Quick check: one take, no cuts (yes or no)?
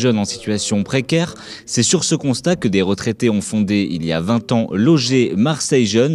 no